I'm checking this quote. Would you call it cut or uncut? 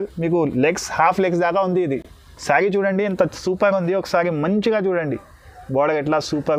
uncut